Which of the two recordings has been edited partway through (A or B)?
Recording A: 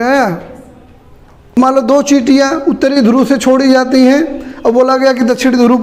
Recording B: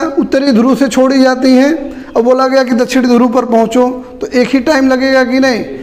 A